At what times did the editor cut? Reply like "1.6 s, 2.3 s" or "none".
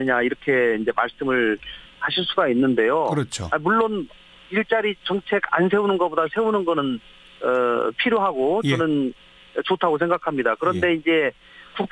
2.3 s